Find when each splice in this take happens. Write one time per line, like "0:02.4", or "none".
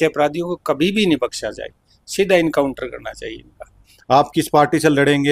0:03.9